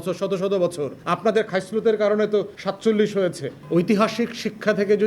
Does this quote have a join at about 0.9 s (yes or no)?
no